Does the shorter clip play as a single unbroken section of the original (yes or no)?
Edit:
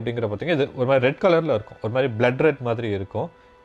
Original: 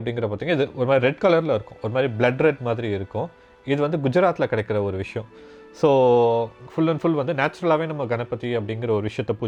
yes